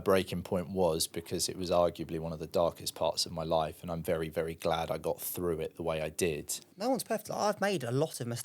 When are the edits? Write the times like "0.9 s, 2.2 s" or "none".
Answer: 6.6 s

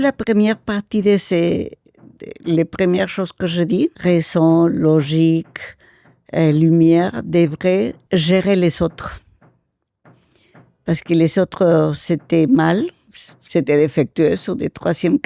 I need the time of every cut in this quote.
4.0 s, 8.0 s

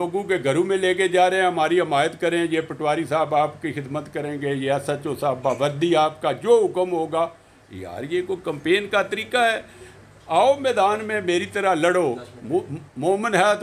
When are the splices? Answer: none

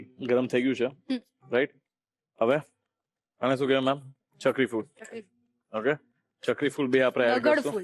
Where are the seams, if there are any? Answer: none

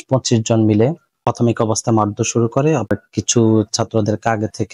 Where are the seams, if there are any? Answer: 1.1 s, 2.9 s

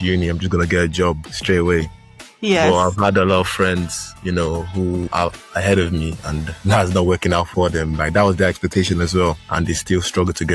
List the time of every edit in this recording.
none

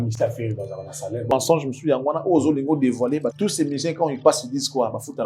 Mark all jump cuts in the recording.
1.3 s, 3.3 s

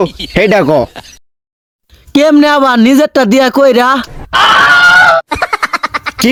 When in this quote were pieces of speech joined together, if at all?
none

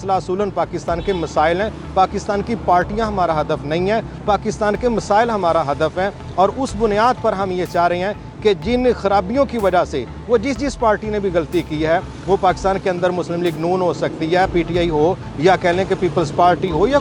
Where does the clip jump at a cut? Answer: none

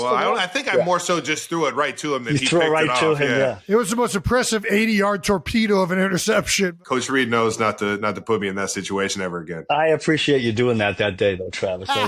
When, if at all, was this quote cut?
6.7 s, 9.5 s

